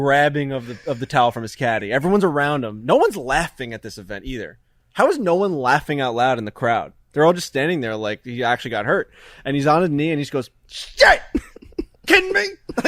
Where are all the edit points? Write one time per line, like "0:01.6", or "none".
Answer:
none